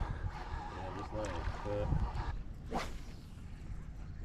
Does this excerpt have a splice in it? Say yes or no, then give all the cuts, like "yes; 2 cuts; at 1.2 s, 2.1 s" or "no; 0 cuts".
yes; 1 cut; at 2.3 s